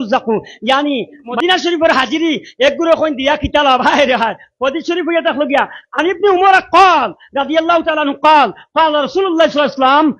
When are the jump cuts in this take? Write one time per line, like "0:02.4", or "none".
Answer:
0:01.4